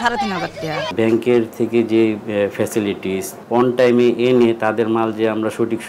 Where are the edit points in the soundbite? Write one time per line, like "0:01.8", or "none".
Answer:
0:00.9
0:03.3